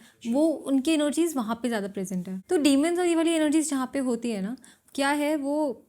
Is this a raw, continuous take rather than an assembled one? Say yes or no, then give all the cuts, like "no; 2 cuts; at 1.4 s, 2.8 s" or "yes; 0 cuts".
no; 1 cut; at 2.3 s